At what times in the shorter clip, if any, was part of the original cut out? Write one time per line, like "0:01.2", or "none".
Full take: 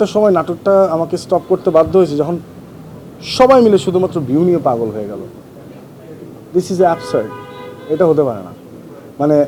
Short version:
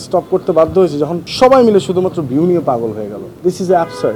0:01.2
0:03.2